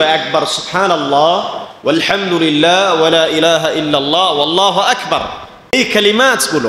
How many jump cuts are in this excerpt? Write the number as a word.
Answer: one